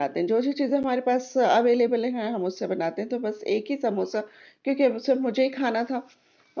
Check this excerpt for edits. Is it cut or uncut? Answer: uncut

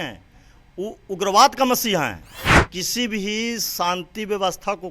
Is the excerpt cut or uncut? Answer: cut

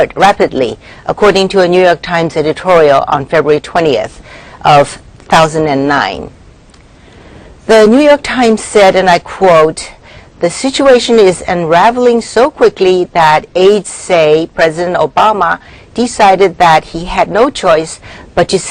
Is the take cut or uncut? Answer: cut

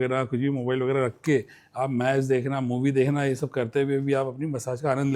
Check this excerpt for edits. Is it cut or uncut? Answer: uncut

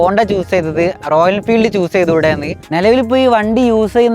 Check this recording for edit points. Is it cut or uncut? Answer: cut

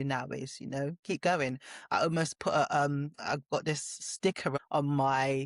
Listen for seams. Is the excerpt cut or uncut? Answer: cut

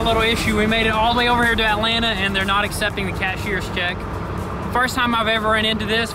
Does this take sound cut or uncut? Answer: uncut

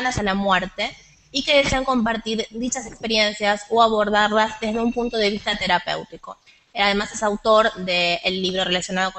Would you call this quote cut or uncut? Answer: cut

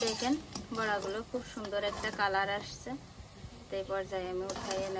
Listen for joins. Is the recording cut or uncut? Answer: uncut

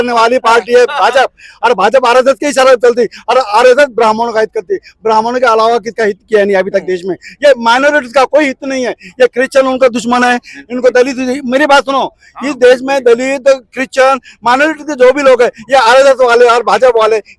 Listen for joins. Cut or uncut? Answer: uncut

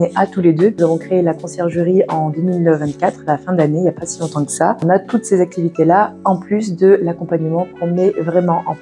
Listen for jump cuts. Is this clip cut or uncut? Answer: cut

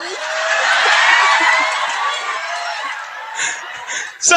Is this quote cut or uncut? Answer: uncut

